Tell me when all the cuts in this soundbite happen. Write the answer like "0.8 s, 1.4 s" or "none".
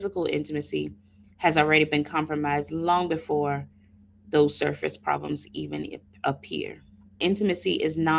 7.2 s